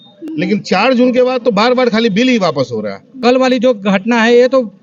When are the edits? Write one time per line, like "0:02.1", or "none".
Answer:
0:03.2